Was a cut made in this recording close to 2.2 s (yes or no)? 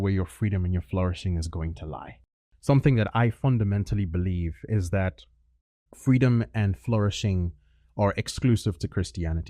yes